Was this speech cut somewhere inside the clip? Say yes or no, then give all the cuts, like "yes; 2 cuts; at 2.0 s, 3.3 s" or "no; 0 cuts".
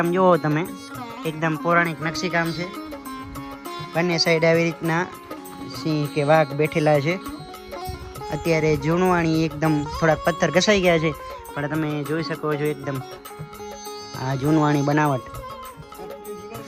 no; 0 cuts